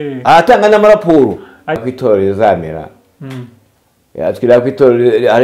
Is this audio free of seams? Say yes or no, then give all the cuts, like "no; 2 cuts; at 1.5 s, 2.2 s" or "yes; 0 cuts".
no; 1 cut; at 1.9 s